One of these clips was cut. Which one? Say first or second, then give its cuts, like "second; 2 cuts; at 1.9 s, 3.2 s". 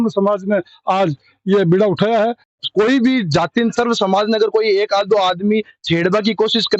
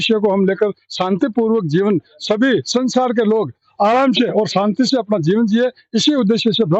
first; 1 cut; at 2.5 s